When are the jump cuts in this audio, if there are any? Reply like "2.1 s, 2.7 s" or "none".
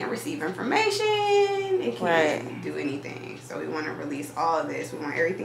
none